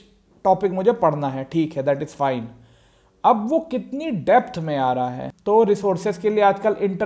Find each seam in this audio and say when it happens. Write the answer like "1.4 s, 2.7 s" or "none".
5.3 s